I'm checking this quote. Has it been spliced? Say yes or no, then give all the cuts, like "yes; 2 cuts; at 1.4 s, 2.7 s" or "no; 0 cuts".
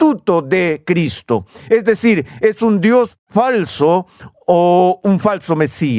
no; 0 cuts